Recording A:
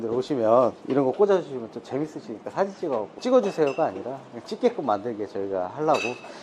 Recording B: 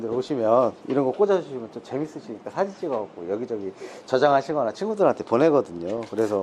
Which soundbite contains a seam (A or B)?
A